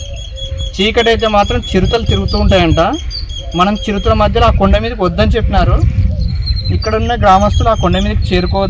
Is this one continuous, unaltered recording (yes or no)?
yes